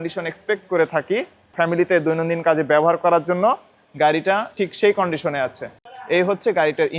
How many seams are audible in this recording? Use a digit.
1